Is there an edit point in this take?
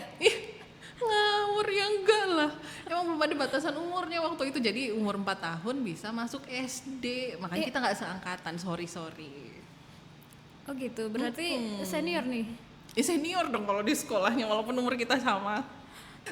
no; 0 cuts

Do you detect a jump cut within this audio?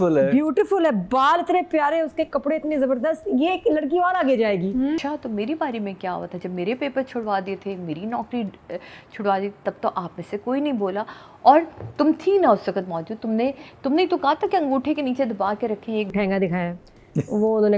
yes; 2 cuts; at 5.0 s, 16.1 s

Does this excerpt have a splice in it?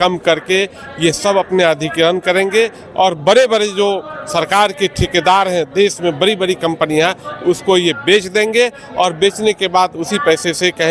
no; 0 cuts

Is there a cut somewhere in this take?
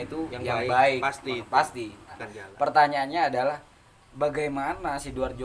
yes; 1 cut; at 2.4 s

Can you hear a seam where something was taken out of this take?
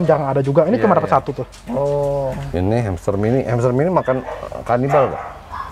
yes; 1 cut; at 2.4 s

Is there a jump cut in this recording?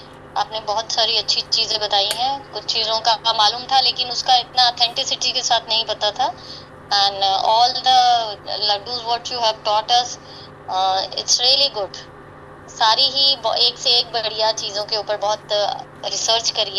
no; 0 cuts

